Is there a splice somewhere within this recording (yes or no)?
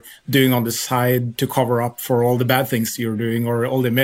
no